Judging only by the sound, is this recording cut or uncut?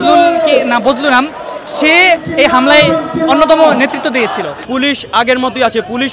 cut